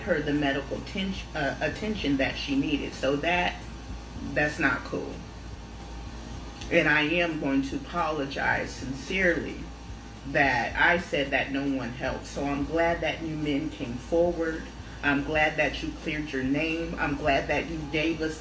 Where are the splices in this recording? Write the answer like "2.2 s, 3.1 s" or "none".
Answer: none